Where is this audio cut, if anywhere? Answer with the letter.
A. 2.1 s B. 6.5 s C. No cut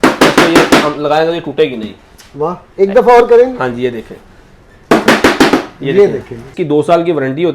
B